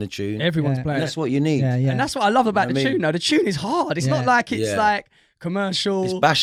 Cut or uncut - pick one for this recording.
uncut